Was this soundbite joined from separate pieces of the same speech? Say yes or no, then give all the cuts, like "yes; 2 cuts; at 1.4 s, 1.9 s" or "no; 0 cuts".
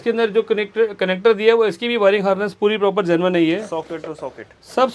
no; 0 cuts